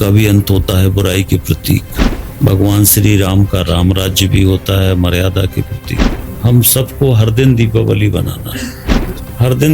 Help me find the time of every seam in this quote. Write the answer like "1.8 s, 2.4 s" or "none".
6.2 s